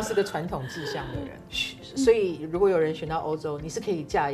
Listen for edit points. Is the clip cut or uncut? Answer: uncut